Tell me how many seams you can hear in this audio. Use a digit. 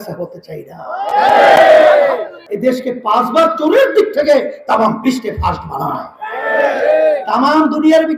1